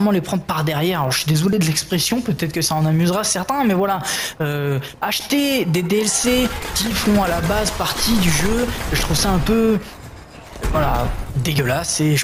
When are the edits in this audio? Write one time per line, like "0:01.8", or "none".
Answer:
none